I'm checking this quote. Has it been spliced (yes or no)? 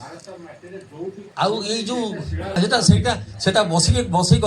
yes